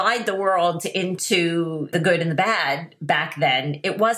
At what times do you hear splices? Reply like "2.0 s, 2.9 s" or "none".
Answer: 1.9 s